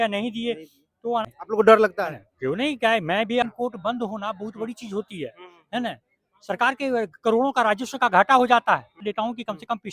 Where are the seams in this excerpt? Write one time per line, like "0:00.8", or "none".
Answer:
0:01.3
0:03.4
0:09.0